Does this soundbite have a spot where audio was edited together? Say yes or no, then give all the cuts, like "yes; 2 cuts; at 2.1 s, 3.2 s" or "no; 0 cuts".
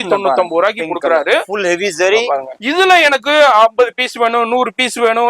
yes; 1 cut; at 2.6 s